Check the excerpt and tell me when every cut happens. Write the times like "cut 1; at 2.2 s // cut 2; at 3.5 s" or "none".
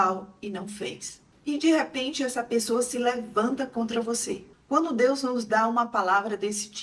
cut 1; at 4.4 s